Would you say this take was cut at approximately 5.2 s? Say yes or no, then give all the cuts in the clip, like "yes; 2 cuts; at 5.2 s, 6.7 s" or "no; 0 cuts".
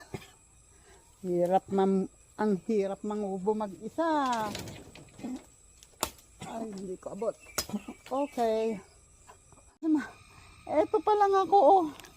no; 1 cut; at 9.8 s